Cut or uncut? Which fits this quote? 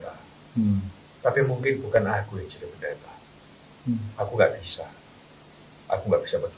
uncut